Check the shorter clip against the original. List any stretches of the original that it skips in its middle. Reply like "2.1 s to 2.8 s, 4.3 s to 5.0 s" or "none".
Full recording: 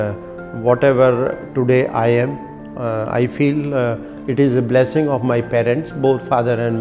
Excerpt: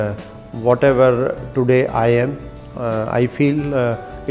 none